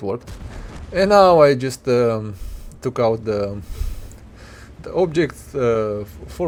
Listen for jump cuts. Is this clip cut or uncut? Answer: uncut